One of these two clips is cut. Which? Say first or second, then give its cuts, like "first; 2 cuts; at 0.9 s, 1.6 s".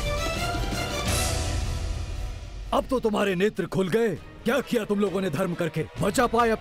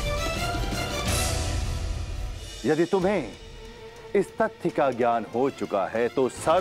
second; 1 cut; at 2.6 s